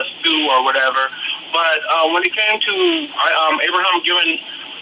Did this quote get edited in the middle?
yes; 1 cut; at 2.2 s

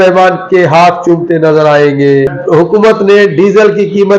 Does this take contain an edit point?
yes; 1 cut; at 2.4 s

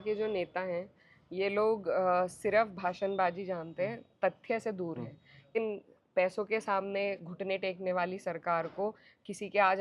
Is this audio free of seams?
no; 1 cut; at 5.6 s

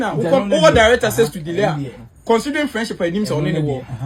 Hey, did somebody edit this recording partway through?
no; 0 cuts

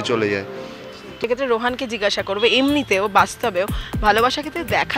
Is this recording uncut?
no; 1 cut; at 1.1 s

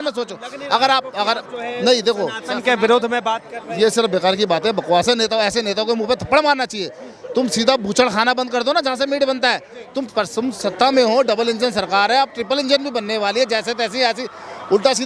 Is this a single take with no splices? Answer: yes; 0 cuts

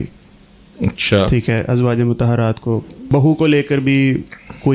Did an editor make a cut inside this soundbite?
yes; 1 cut; at 3.0 s

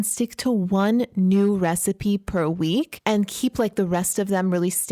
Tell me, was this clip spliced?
yes; 1 cut; at 2.9 s

